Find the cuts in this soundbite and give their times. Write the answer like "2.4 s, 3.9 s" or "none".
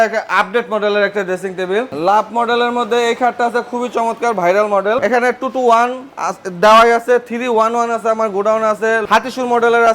1.9 s, 5.0 s